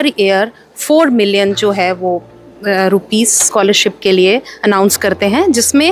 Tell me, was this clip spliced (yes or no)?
no